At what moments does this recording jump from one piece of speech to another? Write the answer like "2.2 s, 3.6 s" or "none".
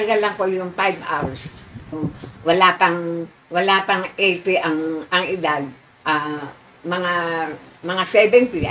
1.9 s